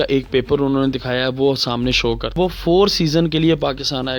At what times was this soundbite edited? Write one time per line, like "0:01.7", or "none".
0:02.4